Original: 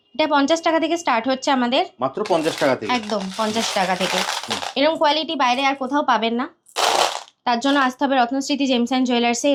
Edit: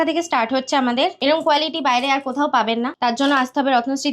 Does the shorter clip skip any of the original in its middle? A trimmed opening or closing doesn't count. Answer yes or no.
yes